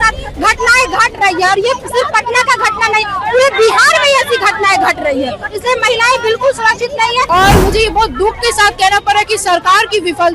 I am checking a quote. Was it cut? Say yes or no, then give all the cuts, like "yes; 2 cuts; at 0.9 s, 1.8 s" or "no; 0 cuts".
yes; 1 cut; at 7.3 s